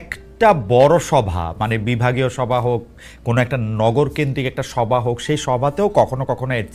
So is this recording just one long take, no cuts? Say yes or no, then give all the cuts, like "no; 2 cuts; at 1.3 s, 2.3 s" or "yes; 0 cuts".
yes; 0 cuts